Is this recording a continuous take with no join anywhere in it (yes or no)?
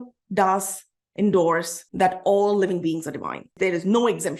no